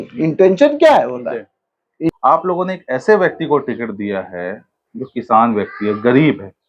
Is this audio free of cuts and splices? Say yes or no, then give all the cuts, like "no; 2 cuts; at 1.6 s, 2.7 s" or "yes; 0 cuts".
no; 1 cut; at 2.1 s